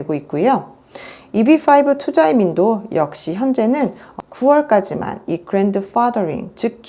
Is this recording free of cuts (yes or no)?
yes